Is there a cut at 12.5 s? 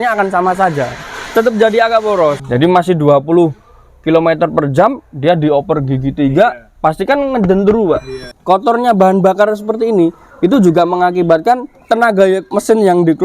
yes; 5 cuts; at 1.2 s, 2.4 s, 8.3 s, 11.7 s, 12.5 s

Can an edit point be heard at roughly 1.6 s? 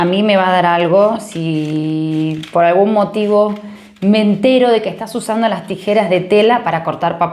no; 0 cuts

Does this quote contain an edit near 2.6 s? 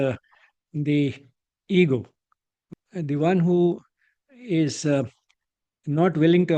yes; 1 cut; at 2.6 s

